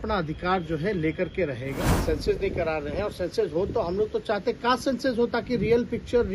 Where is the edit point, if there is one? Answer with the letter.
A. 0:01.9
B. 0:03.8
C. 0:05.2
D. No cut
A